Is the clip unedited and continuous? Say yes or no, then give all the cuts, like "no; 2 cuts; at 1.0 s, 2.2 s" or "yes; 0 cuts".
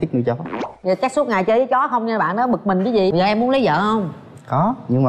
no; 1 cut; at 3.1 s